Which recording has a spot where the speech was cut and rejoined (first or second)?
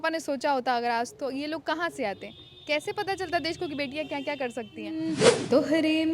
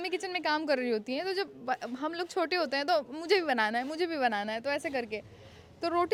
first